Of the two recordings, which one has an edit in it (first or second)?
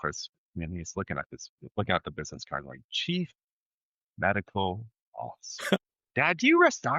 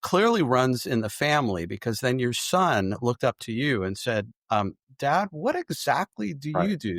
first